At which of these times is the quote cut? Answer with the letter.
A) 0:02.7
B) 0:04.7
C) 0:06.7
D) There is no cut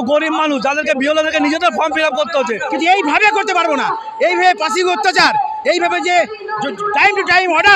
A